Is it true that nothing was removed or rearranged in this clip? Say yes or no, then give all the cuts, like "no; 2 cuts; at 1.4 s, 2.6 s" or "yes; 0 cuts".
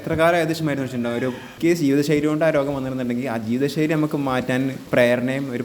no; 2 cuts; at 1.5 s, 4.8 s